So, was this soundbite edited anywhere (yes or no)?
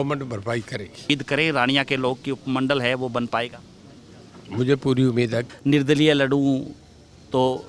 yes